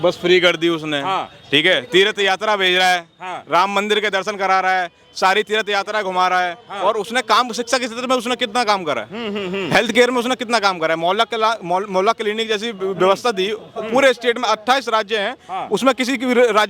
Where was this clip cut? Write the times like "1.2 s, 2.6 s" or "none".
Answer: none